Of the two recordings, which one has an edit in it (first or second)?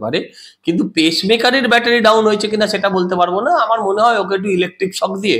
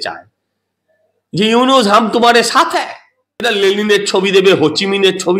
second